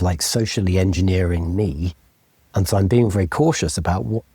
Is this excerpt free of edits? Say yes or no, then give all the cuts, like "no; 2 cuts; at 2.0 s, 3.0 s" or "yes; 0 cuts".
yes; 0 cuts